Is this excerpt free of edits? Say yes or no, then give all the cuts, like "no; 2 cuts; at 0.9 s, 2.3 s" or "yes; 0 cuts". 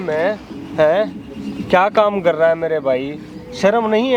yes; 0 cuts